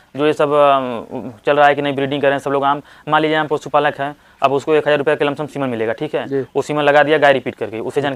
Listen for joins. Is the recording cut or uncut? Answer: uncut